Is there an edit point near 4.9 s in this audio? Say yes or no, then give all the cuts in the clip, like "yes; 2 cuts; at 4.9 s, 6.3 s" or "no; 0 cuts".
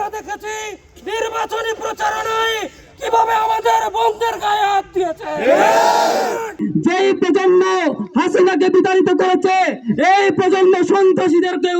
no; 1 cut; at 6.6 s